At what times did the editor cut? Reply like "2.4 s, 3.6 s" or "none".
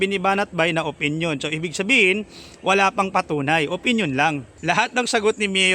4.5 s